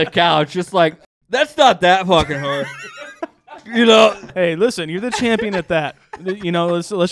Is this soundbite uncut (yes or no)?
no